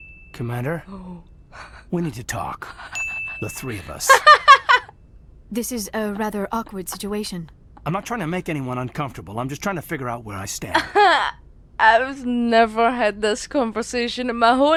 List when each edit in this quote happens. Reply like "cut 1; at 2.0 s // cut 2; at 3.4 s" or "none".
none